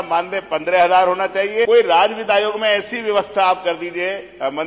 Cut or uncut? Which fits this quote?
cut